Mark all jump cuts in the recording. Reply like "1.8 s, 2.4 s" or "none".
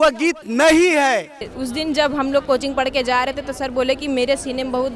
1.5 s